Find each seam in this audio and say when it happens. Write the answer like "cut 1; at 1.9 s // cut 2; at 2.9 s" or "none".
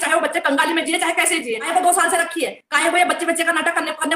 cut 1; at 1.6 s